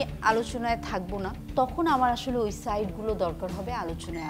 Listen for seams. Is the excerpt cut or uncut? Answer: cut